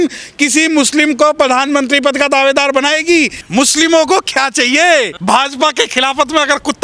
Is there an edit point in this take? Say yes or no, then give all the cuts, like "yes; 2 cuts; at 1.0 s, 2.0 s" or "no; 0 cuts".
yes; 2 cuts; at 3.4 s, 5.1 s